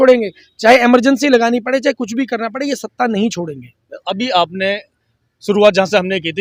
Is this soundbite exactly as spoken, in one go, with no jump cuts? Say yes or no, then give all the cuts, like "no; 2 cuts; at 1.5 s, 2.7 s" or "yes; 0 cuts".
yes; 0 cuts